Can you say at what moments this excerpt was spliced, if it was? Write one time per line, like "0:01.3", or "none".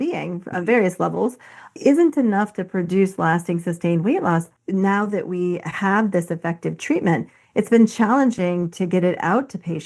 0:04.6